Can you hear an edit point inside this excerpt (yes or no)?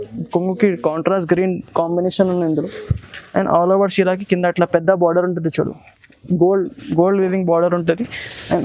no